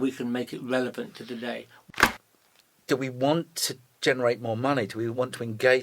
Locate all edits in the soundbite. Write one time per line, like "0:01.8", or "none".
0:01.9